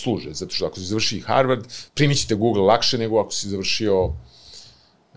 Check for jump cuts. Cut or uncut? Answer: uncut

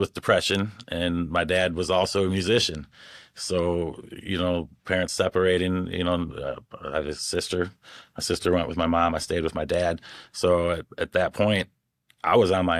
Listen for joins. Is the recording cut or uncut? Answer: uncut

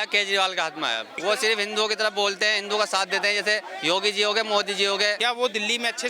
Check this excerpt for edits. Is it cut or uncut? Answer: cut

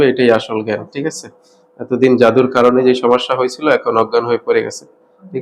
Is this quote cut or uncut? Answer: uncut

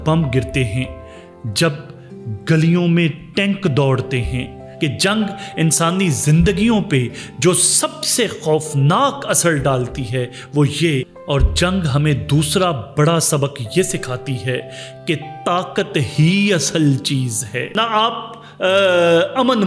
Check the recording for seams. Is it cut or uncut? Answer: cut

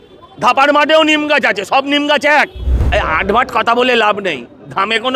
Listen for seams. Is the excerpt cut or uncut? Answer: cut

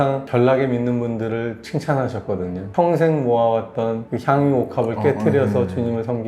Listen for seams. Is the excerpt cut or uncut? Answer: cut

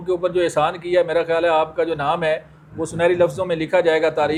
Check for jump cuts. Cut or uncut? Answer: uncut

